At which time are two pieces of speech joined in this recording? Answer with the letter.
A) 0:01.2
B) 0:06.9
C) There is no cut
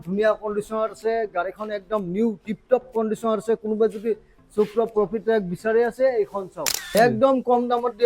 B